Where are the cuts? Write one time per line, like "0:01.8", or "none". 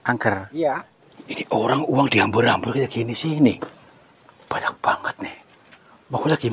0:00.9